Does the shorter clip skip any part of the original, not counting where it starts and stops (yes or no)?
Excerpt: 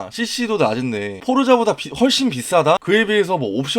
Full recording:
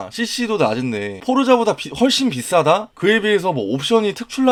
yes